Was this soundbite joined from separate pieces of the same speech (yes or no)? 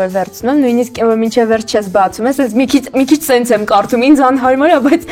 no